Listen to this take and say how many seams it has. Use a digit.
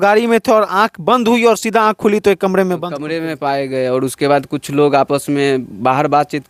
0